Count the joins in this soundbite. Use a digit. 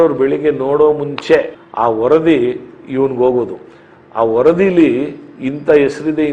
1